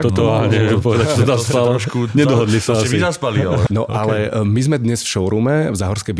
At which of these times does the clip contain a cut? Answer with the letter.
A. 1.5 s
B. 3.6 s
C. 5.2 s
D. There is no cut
B